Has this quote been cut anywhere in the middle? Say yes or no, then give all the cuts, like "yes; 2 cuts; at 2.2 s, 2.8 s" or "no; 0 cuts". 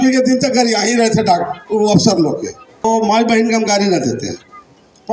yes; 1 cut; at 2.8 s